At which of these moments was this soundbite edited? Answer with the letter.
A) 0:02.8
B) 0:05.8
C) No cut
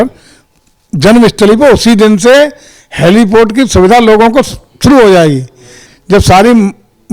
B